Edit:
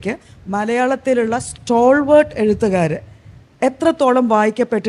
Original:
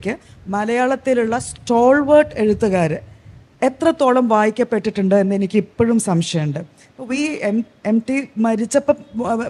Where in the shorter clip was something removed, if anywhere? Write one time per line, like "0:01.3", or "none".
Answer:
none